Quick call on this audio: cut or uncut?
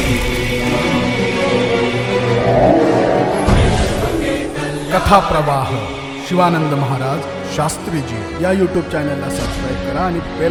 uncut